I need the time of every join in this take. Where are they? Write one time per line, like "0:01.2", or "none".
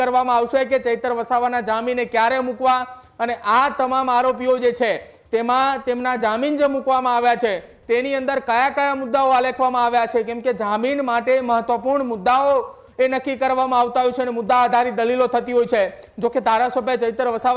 none